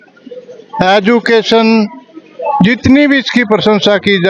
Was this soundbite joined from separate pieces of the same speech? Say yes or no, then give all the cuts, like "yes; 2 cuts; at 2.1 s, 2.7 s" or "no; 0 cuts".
no; 0 cuts